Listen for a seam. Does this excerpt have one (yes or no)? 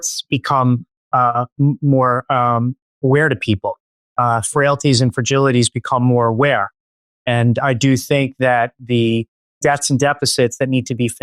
yes